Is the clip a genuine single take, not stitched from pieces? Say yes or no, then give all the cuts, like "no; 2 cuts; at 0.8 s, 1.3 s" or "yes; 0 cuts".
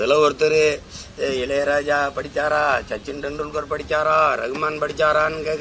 yes; 0 cuts